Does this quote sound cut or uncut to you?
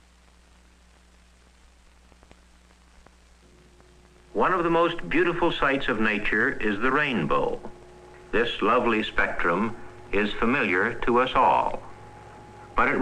cut